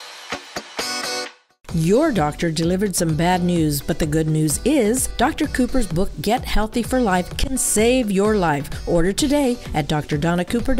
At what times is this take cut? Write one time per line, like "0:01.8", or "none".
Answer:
0:01.5